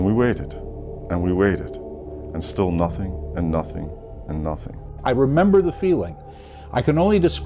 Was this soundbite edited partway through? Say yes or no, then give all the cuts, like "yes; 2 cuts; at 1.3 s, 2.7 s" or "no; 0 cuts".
yes; 1 cut; at 4.9 s